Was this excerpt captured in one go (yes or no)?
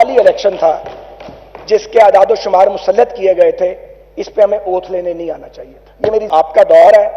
no